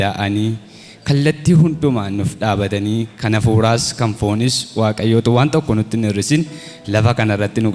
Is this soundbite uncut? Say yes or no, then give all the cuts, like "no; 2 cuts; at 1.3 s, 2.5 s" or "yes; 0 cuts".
yes; 0 cuts